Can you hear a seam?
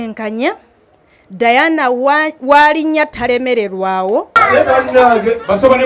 yes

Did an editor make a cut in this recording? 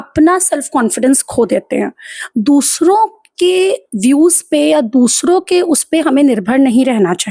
no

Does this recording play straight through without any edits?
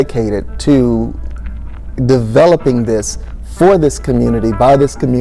yes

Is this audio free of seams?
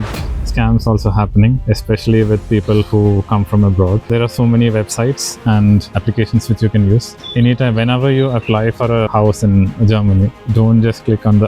no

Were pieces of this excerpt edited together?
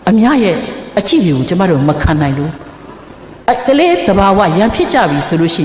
no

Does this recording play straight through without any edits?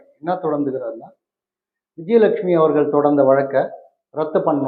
yes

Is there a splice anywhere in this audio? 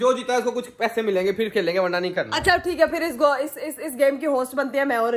no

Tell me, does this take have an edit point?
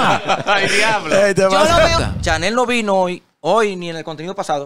yes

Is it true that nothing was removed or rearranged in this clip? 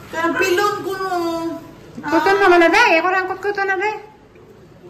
yes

